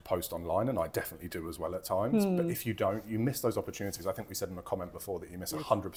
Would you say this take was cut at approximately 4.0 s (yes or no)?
no